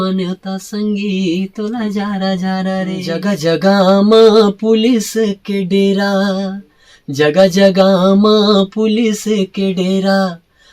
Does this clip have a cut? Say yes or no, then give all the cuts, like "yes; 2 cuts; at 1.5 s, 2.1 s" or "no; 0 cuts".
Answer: yes; 1 cut; at 3.1 s